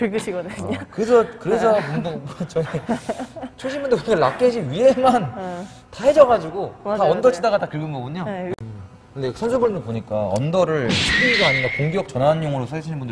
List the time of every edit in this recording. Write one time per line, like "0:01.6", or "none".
0:08.5